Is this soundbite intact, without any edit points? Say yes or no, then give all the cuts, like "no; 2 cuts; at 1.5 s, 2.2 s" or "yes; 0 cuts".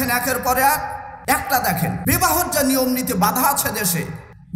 no; 2 cuts; at 1.1 s, 2.0 s